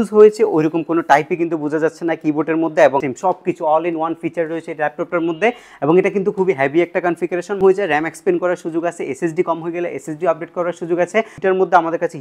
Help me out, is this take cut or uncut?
cut